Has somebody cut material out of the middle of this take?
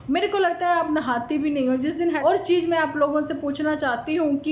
yes; 1 cut; at 2.2 s

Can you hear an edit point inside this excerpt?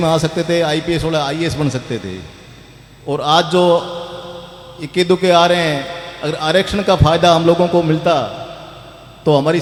no; 0 cuts

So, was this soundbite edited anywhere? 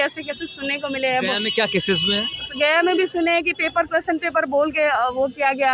no; 0 cuts

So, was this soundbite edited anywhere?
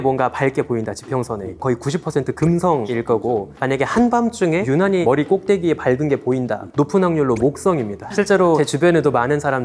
yes; 5 cuts; at 1.6 s, 2.9 s, 4.9 s, 6.7 s, 8.5 s

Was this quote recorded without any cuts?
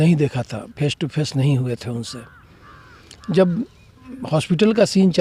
yes; 0 cuts

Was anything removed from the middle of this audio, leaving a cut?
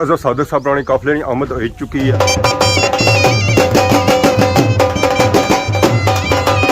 yes; 1 cut; at 2.1 s

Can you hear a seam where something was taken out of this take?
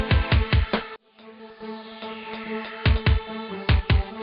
yes; 1 cut; at 1.0 s

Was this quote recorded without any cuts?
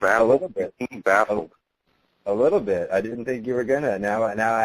no; 1 cut; at 3.1 s

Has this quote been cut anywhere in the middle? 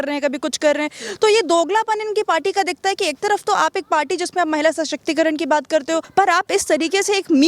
yes; 1 cut; at 6.1 s

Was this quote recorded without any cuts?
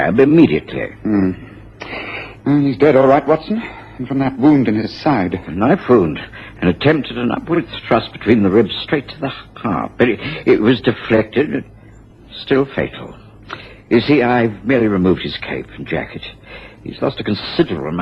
no; 1 cut; at 5.5 s

